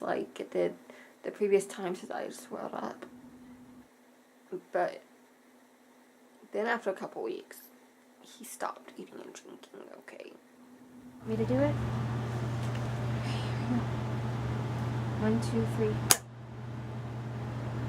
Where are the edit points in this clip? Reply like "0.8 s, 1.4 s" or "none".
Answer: 3.8 s, 11.3 s

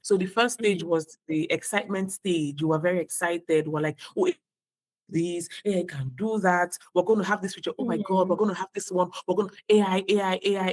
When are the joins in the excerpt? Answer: none

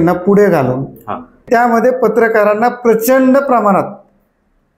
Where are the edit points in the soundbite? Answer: 1.5 s

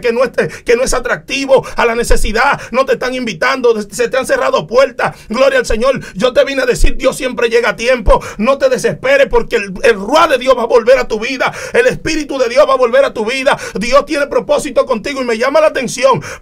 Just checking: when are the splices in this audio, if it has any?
none

